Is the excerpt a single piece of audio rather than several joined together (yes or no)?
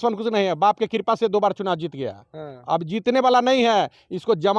yes